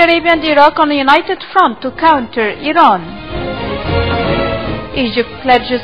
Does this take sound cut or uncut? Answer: uncut